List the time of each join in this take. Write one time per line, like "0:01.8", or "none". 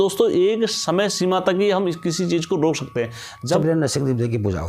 0:03.6